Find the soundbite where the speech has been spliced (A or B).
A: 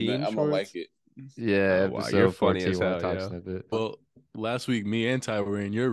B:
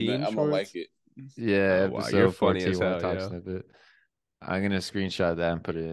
A